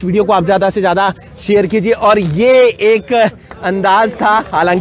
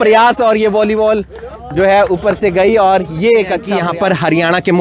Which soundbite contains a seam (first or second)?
second